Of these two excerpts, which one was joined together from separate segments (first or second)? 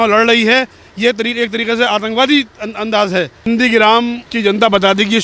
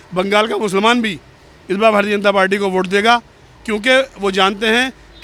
first